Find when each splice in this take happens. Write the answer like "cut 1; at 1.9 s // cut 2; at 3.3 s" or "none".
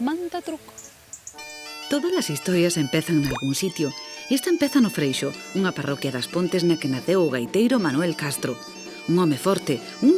cut 1; at 7.4 s